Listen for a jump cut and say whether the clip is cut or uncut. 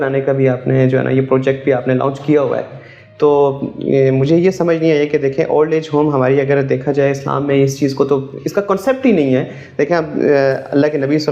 uncut